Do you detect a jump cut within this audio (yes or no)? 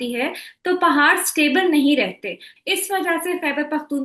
yes